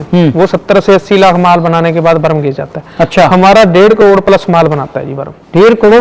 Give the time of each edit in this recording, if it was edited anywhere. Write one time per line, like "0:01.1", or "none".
none